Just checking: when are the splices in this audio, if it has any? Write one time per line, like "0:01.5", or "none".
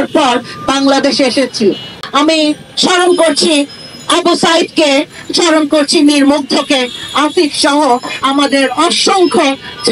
0:01.9